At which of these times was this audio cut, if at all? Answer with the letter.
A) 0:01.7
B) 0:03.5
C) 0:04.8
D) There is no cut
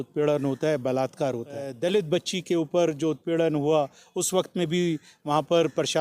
A